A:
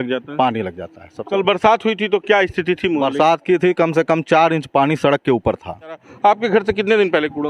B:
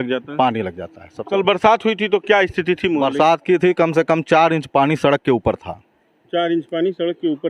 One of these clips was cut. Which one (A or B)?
A